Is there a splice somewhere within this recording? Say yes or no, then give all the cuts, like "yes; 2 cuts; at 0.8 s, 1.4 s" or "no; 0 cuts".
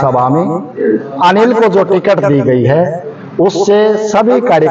no; 0 cuts